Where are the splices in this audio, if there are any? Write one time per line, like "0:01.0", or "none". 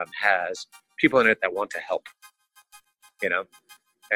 0:02.7